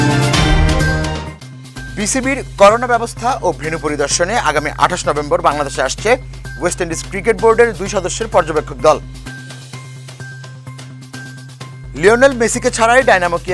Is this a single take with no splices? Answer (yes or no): yes